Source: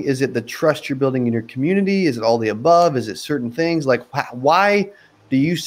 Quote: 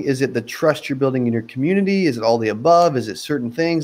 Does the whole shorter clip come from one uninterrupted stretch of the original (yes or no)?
yes